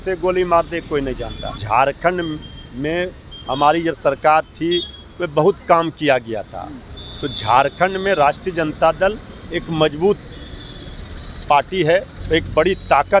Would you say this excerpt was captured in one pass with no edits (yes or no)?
no